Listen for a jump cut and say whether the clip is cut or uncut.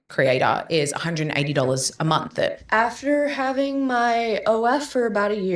cut